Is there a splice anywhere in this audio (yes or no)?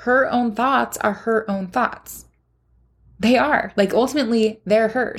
no